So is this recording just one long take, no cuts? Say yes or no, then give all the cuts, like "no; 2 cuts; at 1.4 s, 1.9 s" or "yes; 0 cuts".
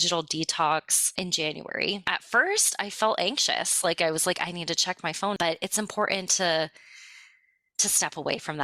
no; 3 cuts; at 1.1 s, 2.1 s, 5.4 s